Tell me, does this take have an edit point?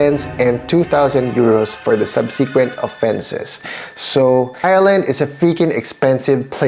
yes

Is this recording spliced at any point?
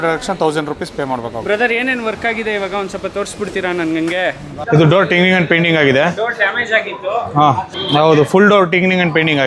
no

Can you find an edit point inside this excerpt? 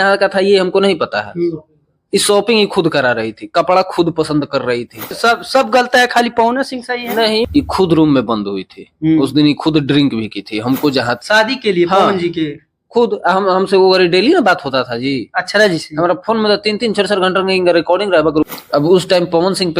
yes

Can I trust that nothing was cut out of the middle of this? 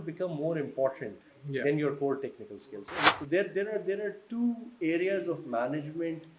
no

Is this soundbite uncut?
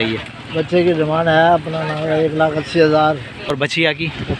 no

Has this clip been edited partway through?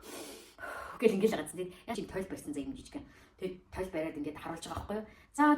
yes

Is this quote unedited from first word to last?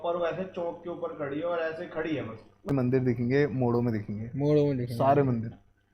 no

